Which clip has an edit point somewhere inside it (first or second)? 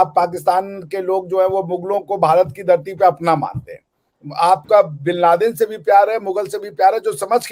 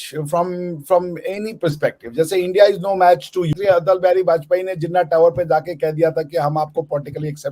second